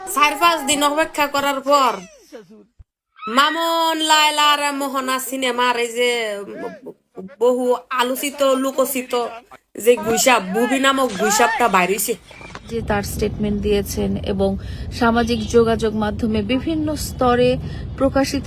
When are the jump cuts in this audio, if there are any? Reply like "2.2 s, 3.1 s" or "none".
12.8 s